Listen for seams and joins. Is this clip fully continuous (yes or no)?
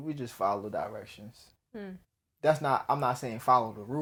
yes